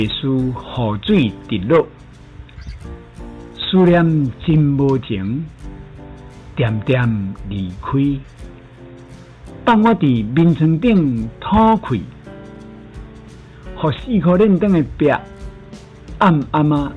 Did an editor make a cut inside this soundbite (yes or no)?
no